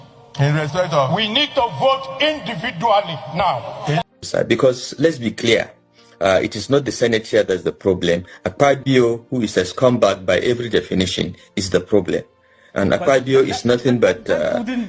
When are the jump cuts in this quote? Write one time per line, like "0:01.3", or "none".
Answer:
0:04.1